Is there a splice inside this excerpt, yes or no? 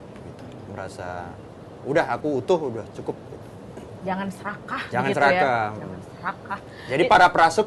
no